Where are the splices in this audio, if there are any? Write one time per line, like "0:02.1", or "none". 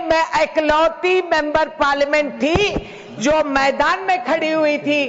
none